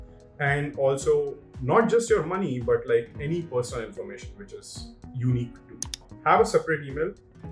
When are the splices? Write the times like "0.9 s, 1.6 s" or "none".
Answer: 6.1 s